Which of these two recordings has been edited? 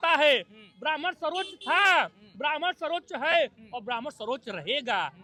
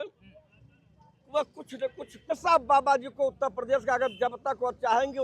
second; 1 cut; at 2.3 s

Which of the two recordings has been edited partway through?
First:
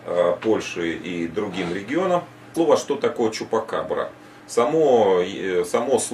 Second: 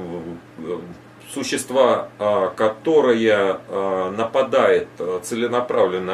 first; 1 cut; at 2.5 s

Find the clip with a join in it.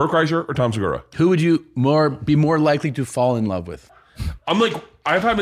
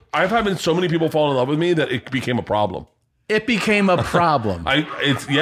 first; 2 cuts; at 1.1 s, 3.8 s

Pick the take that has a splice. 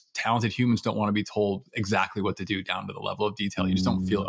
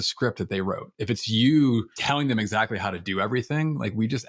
second; 1 cut; at 1.9 s

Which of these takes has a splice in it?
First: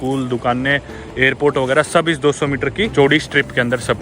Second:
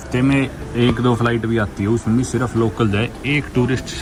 first; 1 cut; at 2.9 s

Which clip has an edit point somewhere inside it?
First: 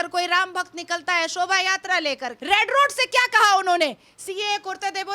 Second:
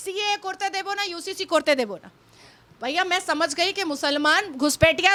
first; 1 cut; at 2.3 s

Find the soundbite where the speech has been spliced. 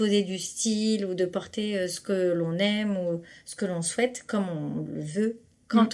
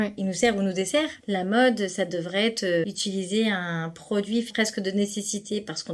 second; 3 cuts; at 1.2 s, 2.8 s, 4.5 s

